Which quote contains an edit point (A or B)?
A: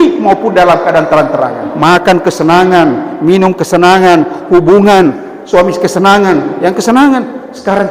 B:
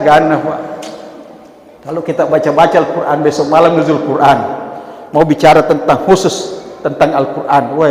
A